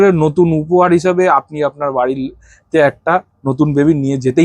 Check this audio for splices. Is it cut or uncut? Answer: uncut